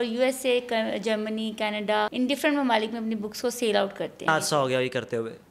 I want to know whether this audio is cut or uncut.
cut